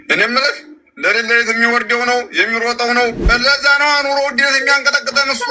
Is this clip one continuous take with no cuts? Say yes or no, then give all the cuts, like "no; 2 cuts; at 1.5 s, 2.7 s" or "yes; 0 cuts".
no; 1 cut; at 3.2 s